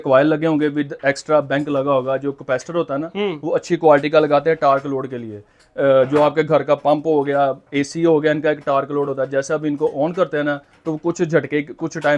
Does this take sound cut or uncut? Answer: uncut